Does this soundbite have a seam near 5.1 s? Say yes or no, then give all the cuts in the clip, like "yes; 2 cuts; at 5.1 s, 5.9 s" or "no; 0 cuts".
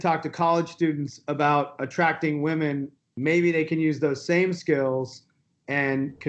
no; 1 cut; at 2.9 s